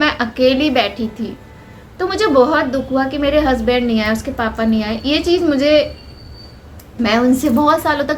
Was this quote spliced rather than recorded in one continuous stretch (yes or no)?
no